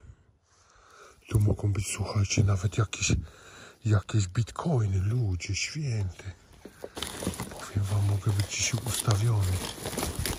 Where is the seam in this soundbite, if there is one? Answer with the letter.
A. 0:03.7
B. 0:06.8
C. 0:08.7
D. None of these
D